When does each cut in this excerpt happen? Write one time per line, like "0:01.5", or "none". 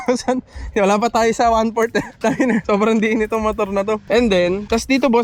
none